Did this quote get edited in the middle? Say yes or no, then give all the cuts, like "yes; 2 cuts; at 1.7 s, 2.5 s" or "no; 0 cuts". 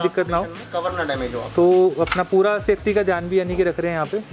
no; 0 cuts